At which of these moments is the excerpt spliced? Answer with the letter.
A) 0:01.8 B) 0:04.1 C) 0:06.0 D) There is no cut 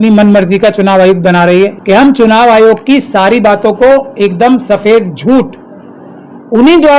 A